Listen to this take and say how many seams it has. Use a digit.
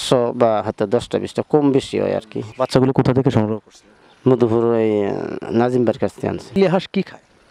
2